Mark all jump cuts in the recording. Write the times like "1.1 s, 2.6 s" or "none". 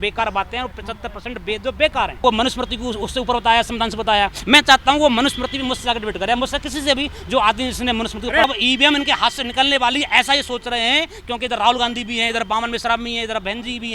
2.2 s, 8.4 s